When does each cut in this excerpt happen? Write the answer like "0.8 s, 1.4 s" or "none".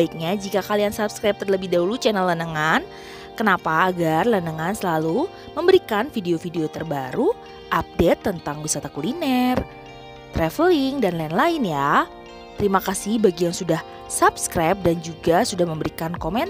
none